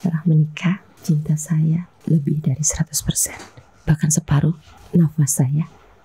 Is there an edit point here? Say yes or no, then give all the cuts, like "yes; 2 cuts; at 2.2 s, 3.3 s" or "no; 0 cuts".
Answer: yes; 3 cuts; at 0.9 s, 1.9 s, 4.7 s